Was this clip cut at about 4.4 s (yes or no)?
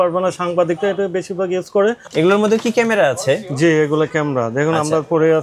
no